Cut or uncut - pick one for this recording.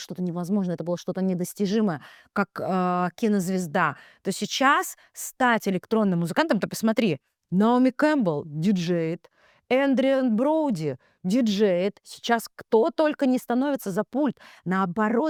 uncut